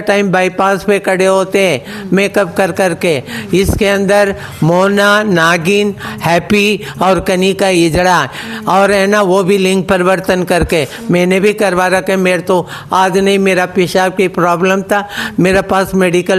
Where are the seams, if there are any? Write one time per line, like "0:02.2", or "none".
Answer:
none